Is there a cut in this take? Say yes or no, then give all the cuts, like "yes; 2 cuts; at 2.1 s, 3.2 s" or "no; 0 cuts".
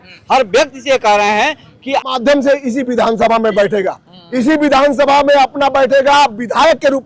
yes; 1 cut; at 2.1 s